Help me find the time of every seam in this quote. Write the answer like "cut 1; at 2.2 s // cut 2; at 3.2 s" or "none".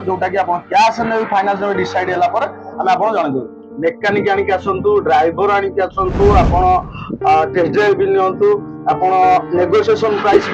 cut 1; at 3.6 s